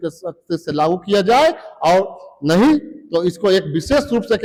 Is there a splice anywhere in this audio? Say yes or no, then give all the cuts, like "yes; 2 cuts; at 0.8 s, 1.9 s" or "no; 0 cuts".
no; 0 cuts